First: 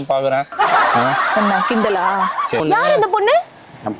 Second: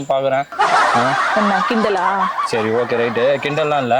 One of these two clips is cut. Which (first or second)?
first